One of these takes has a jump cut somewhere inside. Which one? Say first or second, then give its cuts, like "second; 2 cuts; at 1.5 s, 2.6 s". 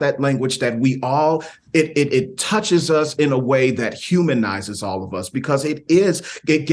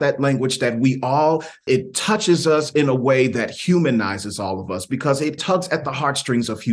second; 2 cuts; at 1.7 s, 5.4 s